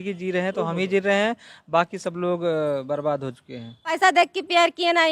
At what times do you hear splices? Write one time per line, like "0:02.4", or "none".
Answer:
0:04.0